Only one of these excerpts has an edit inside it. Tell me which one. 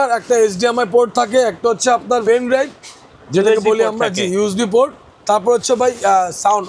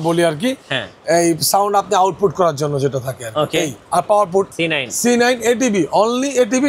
second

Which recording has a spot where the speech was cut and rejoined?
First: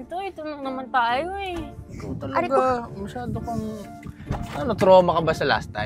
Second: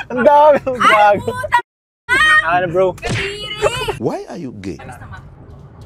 second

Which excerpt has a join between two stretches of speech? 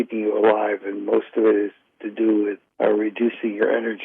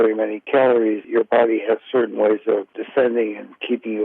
second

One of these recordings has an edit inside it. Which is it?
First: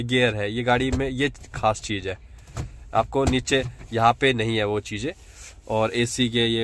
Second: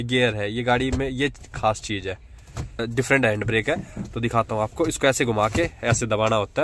second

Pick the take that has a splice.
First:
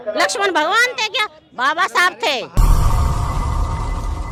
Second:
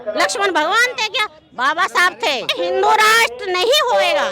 second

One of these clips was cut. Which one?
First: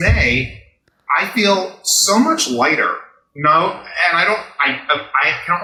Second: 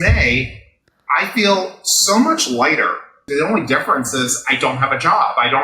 second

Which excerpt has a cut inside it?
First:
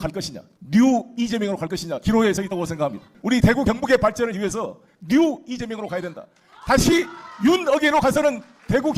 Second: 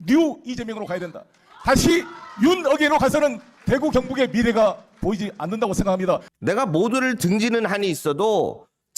second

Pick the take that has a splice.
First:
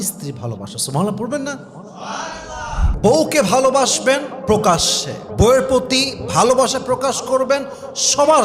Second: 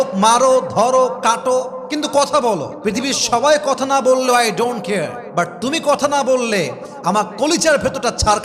first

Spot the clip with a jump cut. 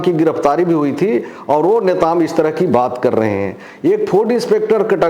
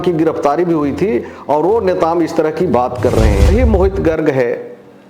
second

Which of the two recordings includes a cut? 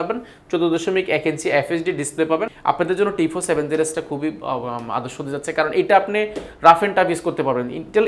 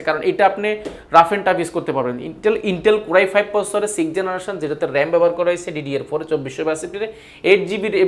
first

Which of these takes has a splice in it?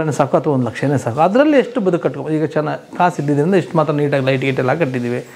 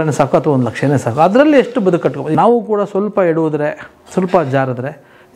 second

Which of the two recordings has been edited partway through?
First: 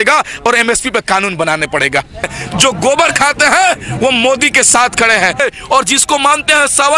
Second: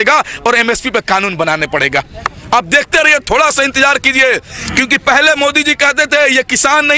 first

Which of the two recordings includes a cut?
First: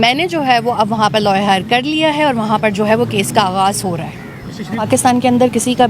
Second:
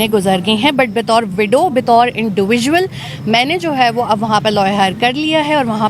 first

